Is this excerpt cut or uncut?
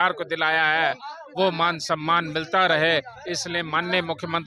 uncut